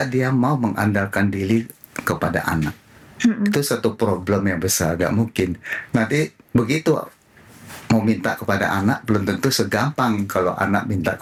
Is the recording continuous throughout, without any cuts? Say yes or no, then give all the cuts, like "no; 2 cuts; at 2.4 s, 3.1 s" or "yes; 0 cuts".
yes; 0 cuts